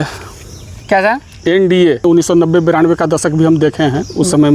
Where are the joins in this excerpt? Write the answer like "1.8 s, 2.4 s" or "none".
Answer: 2.0 s